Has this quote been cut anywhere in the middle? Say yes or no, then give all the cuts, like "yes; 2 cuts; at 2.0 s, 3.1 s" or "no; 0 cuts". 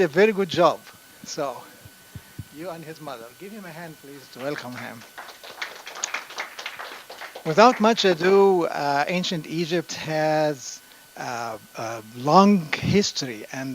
yes; 1 cut; at 2.8 s